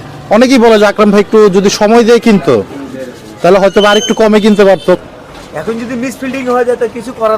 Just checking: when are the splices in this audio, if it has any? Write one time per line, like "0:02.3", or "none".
0:05.0